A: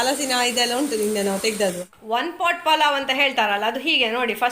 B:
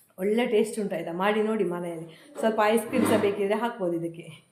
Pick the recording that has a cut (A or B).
A